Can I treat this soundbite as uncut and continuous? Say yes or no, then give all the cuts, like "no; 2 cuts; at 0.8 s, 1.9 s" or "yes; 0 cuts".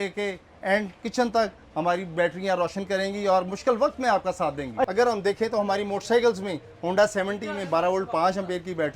no; 1 cut; at 4.9 s